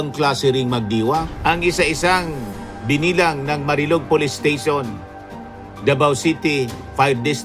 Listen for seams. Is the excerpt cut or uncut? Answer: cut